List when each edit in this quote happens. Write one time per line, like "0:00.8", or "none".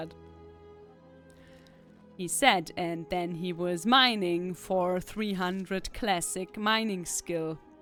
none